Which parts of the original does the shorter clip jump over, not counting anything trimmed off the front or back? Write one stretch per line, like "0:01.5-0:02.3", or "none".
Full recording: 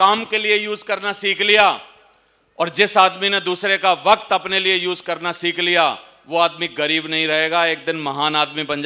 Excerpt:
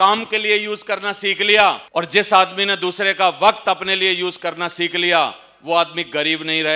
0:01.8-0:02.5